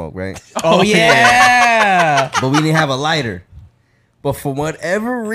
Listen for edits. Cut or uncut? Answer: uncut